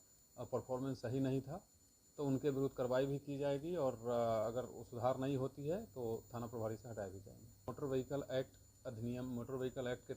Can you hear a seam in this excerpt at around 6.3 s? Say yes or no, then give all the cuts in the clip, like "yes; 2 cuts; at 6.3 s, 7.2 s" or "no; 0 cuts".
no; 1 cut; at 7.7 s